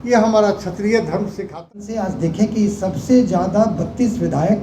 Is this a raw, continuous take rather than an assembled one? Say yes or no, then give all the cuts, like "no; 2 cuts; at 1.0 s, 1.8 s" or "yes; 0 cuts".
no; 1 cut; at 1.8 s